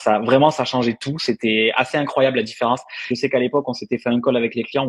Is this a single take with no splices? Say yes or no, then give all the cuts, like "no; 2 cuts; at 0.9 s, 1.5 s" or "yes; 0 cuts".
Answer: no; 1 cut; at 3.1 s